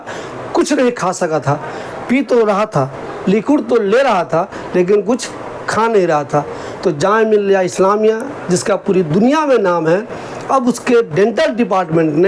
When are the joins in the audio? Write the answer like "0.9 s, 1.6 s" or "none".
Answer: none

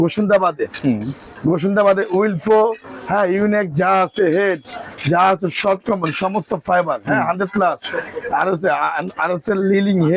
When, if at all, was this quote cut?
none

